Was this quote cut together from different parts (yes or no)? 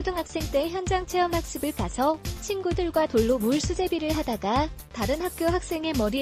no